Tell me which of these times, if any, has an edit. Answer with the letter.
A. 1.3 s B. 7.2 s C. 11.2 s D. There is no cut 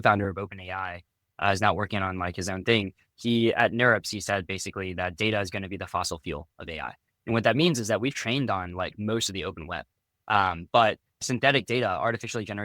C